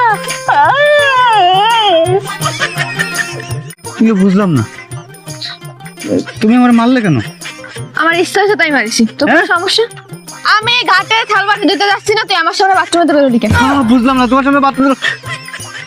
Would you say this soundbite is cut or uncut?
uncut